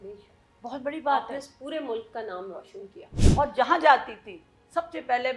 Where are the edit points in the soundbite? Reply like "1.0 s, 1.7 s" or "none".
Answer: none